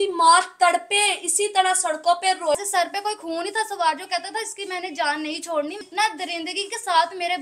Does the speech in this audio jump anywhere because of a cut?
yes; 2 cuts; at 2.5 s, 5.8 s

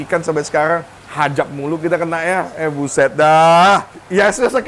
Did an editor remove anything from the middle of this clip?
no; 0 cuts

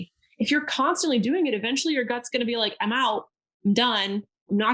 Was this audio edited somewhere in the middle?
no; 0 cuts

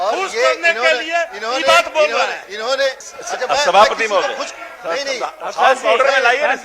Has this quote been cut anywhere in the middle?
yes; 1 cut; at 3.1 s

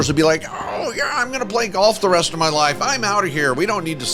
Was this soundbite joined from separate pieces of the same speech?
no; 0 cuts

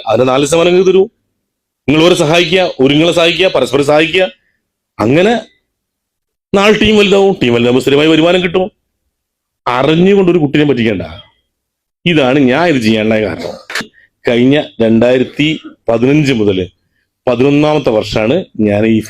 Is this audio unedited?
no; 1 cut; at 14.0 s

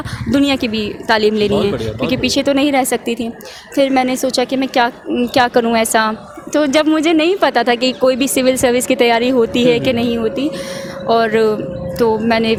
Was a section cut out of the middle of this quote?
no; 0 cuts

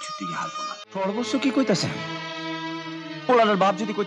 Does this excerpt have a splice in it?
yes; 1 cut; at 1.0 s

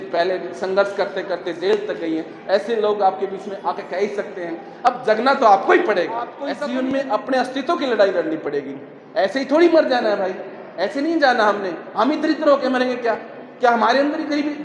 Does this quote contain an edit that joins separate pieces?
yes; 1 cut; at 6.4 s

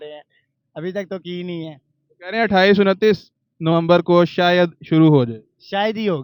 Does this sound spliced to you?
no; 0 cuts

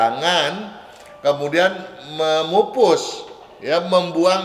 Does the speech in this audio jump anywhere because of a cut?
no; 0 cuts

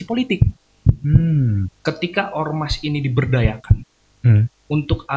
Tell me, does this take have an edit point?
yes; 1 cut; at 1.7 s

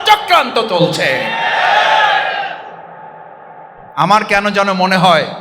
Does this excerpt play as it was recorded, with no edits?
no; 1 cut; at 3.8 s

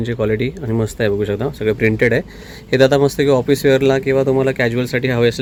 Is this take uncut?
yes; 0 cuts

